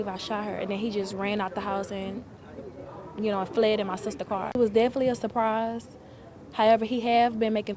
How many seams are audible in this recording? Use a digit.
1